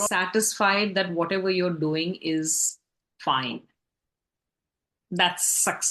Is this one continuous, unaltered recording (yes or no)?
yes